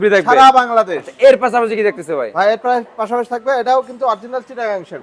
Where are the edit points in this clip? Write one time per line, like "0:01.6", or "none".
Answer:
none